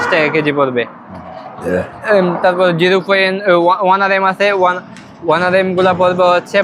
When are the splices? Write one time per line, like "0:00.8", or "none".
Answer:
none